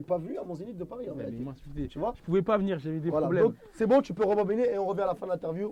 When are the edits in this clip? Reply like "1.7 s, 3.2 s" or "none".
none